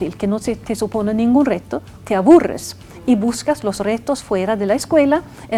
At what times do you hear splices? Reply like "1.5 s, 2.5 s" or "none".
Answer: none